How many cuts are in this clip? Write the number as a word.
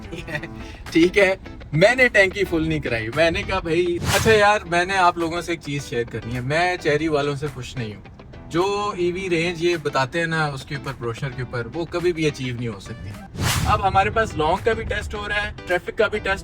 three